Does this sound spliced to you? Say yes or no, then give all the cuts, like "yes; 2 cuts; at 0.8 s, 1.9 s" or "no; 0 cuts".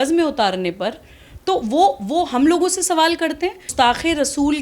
yes; 1 cut; at 3.7 s